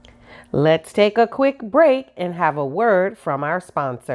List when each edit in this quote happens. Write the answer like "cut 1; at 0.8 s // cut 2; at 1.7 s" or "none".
none